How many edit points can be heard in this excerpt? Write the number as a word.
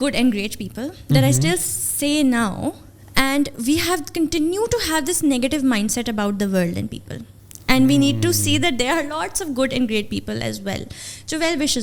zero